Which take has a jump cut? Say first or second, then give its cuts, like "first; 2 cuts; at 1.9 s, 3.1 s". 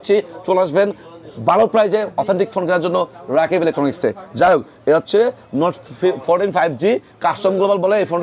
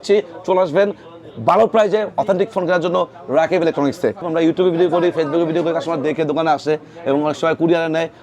second; 1 cut; at 4.3 s